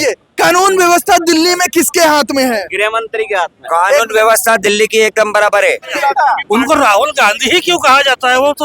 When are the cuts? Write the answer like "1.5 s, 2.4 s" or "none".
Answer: 5.9 s